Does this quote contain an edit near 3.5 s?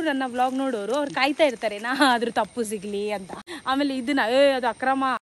yes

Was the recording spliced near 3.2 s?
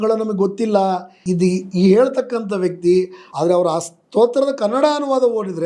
yes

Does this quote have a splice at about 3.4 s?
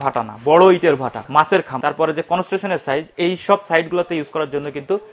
no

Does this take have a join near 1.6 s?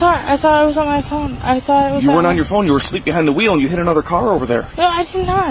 no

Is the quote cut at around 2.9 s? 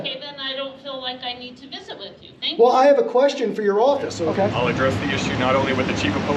no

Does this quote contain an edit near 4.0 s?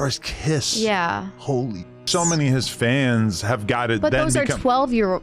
no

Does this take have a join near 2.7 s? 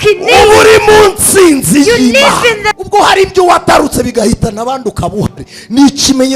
yes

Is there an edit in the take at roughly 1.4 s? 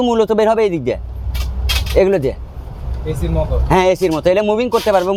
no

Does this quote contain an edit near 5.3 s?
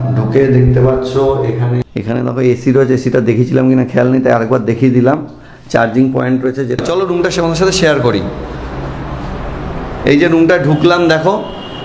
no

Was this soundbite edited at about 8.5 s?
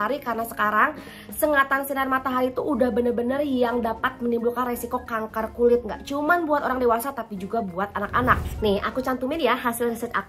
yes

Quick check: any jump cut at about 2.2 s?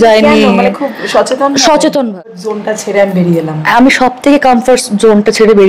yes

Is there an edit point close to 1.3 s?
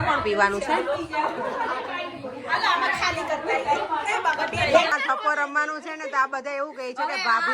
no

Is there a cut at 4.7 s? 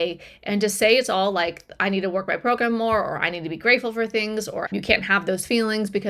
yes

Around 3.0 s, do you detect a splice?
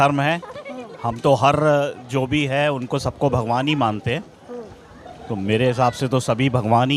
no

